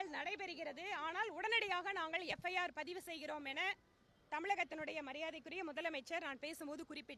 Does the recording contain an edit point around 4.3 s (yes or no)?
no